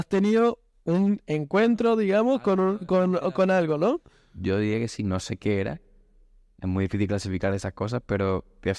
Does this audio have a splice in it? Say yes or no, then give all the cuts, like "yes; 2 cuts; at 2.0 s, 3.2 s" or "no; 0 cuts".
no; 0 cuts